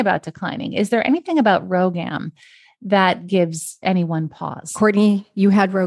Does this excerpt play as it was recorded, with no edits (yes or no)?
no